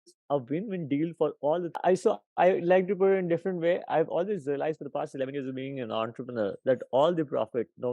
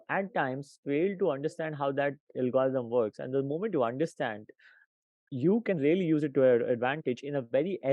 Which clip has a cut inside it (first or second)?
first